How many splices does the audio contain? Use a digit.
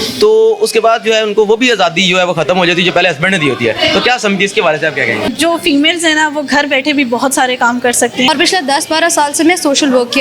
2